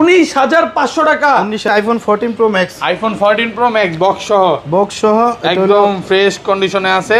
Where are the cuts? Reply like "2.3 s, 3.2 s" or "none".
1.7 s